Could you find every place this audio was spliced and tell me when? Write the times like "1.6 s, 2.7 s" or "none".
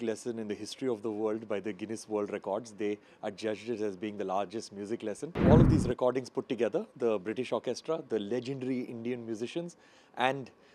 5.4 s